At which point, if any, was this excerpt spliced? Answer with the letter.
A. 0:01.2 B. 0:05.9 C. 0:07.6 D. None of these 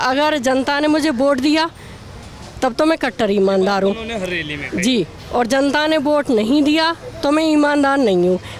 D